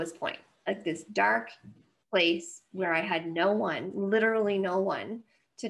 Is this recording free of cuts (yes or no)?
yes